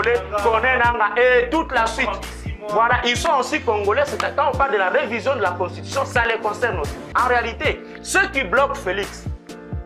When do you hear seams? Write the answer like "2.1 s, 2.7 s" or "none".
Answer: 7.0 s